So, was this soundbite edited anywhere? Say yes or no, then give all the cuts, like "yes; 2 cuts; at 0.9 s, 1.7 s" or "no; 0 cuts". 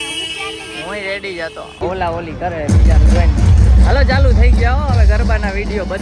yes; 1 cut; at 1.8 s